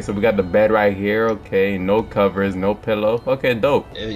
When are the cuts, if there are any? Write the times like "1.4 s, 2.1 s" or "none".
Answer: none